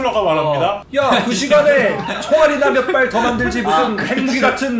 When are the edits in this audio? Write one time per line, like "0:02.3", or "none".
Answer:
none